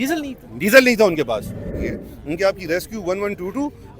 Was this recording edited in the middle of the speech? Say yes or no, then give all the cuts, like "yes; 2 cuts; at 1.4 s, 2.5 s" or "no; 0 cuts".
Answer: yes; 1 cut; at 1.7 s